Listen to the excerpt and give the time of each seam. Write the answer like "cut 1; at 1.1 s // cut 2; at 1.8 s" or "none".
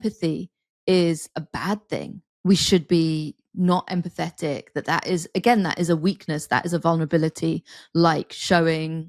none